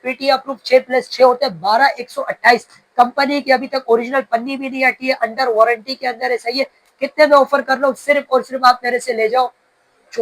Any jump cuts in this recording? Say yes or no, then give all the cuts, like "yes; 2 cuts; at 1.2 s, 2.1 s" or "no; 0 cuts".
no; 0 cuts